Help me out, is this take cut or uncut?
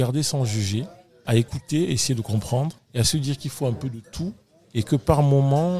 uncut